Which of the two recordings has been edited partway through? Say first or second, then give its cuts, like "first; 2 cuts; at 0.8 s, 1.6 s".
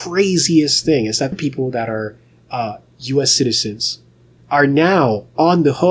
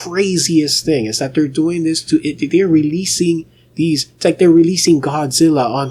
first; 1 cut; at 1.3 s